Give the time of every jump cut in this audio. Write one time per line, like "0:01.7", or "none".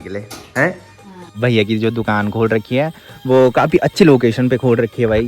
0:01.3